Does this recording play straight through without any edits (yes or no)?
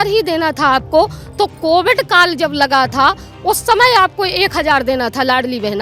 yes